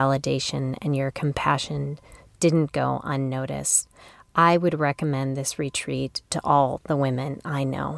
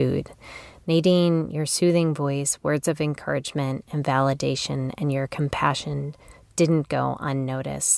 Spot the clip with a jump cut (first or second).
first